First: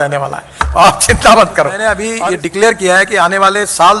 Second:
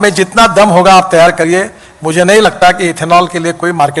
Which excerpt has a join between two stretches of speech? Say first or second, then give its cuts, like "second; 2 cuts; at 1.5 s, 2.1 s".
first; 1 cut; at 2.1 s